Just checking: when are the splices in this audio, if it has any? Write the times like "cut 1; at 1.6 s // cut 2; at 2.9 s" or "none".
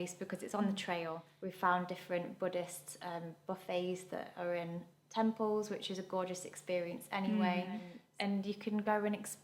cut 1; at 1.3 s // cut 2; at 8.0 s